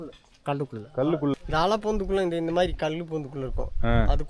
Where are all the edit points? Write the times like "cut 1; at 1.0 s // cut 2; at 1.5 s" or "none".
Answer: cut 1; at 1.3 s

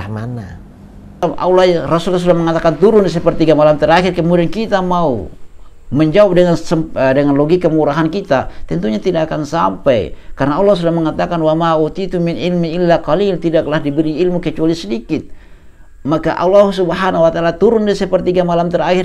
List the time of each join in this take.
cut 1; at 1.2 s

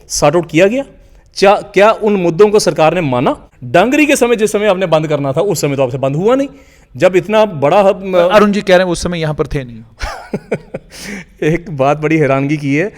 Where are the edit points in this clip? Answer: cut 1; at 3.5 s

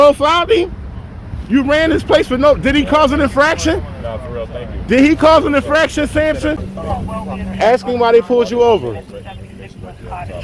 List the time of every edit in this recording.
cut 1; at 6.7 s

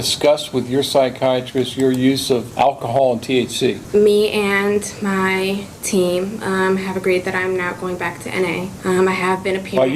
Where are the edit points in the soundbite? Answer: cut 1; at 2.5 s // cut 2; at 3.8 s // cut 3; at 8.7 s

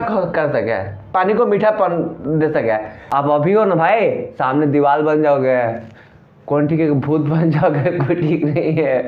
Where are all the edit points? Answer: cut 1; at 3.1 s

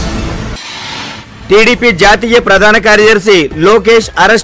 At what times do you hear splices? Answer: none

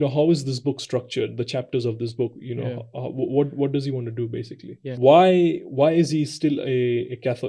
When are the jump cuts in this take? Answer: cut 1; at 5.0 s

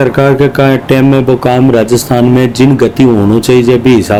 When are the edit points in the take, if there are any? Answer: none

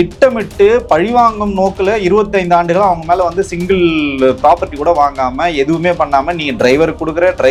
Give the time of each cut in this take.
none

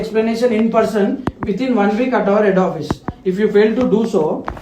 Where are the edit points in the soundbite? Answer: none

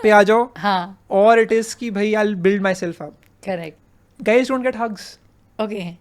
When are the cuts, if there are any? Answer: cut 1; at 3.8 s

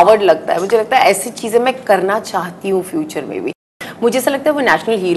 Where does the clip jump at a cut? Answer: cut 1; at 3.7 s

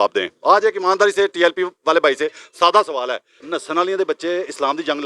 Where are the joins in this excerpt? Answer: cut 1; at 3.3 s

